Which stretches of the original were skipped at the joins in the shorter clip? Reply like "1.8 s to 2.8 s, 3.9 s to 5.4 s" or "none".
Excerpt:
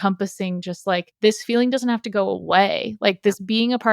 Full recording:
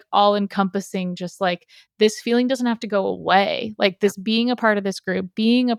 1.6 s to 1.9 s